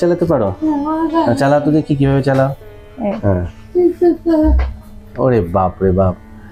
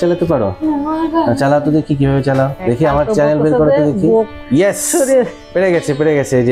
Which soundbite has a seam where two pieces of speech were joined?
second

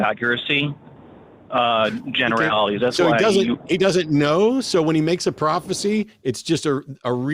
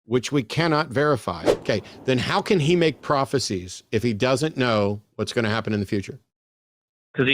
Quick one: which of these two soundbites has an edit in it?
second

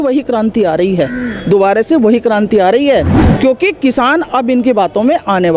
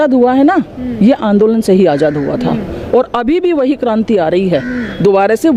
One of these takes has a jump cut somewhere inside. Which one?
first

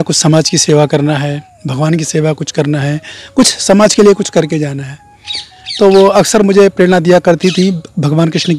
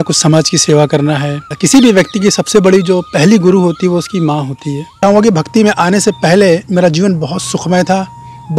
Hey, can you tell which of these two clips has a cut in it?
second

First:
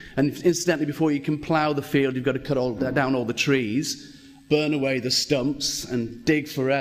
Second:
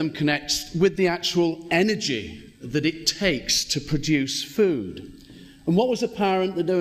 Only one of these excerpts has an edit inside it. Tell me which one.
second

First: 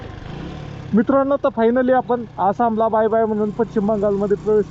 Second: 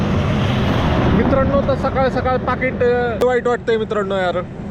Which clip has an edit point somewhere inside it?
second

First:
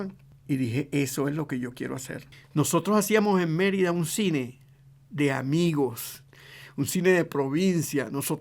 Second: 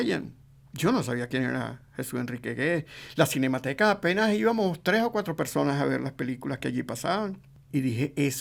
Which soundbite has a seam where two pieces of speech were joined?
first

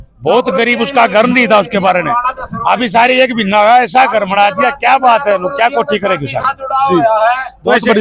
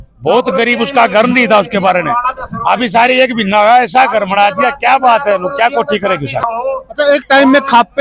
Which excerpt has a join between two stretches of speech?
second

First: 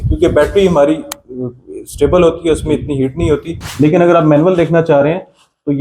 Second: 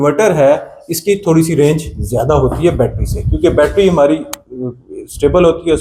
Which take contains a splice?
first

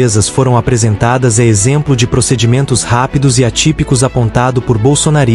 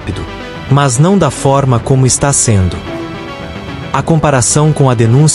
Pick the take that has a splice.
second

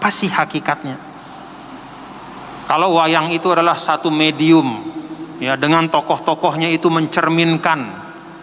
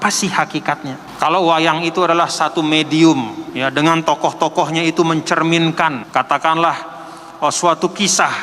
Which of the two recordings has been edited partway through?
second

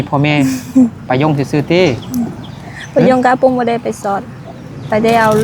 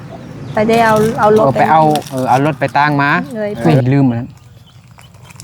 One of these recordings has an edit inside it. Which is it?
second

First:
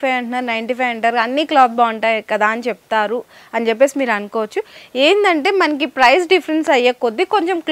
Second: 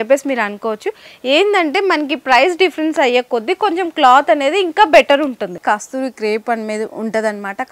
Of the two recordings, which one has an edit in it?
second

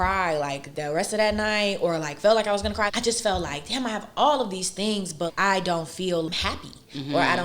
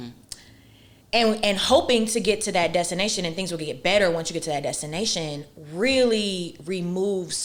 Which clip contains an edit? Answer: first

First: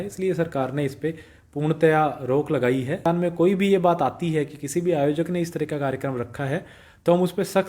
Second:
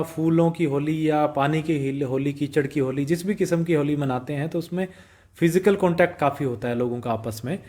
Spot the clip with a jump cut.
first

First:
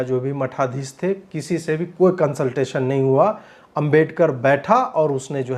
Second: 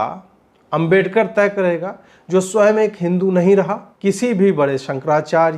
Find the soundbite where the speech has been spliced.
second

